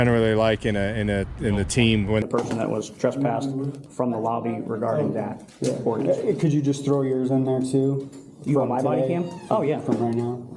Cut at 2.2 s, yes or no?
yes